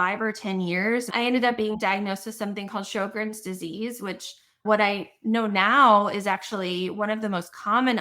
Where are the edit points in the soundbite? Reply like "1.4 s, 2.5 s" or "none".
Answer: 1.1 s